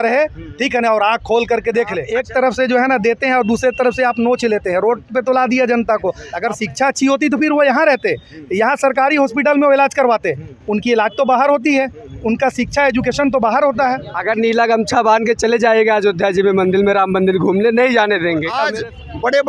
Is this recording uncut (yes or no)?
no